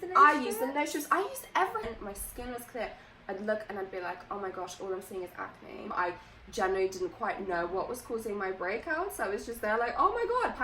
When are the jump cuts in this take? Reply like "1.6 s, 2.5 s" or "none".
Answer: 1.8 s, 5.9 s